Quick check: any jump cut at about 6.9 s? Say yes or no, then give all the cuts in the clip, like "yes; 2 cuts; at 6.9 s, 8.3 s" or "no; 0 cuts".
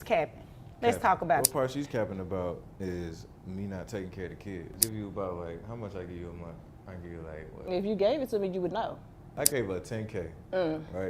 no; 3 cuts; at 1.4 s, 4.8 s, 9.4 s